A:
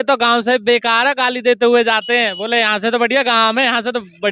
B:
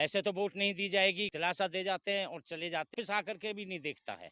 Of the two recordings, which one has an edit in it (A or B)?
B